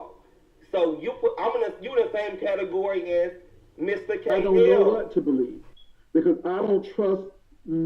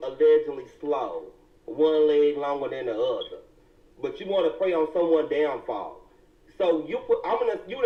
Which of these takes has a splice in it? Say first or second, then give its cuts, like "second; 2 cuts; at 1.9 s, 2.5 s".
first; 1 cut; at 4.7 s